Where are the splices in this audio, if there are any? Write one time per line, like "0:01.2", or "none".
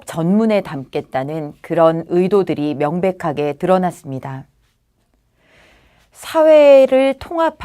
0:02.9